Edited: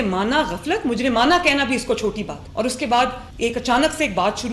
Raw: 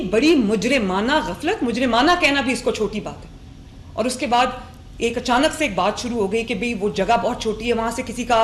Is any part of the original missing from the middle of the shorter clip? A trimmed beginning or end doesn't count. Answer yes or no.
yes